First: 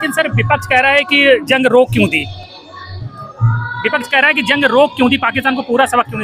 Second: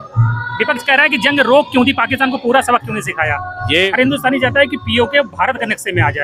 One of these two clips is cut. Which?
second; 1 cut; at 3.9 s

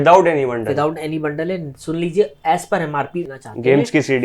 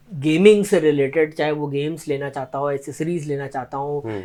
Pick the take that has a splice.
first; 1 cut; at 3.3 s

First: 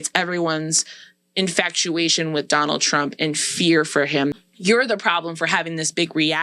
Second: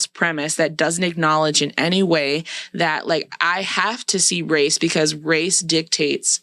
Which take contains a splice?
first; 1 cut; at 4.4 s

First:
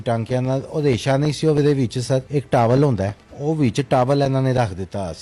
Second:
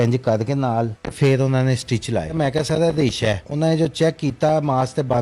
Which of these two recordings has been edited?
second; 3 cuts; at 1.0 s, 2.3 s, 3.5 s

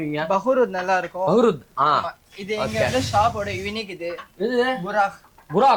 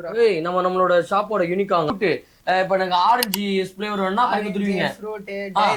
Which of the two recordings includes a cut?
second; 1 cut; at 1.9 s

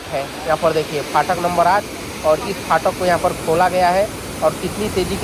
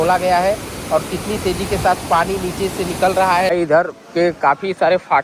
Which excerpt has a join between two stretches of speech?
second; 1 cut; at 3.5 s

